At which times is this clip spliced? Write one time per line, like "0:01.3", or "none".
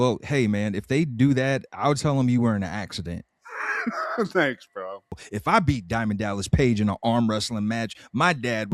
0:05.3